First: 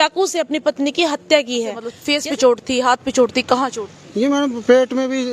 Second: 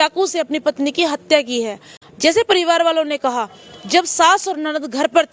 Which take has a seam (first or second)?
first